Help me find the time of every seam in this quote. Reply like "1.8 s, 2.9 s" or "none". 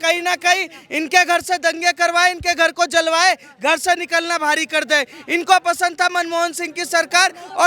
none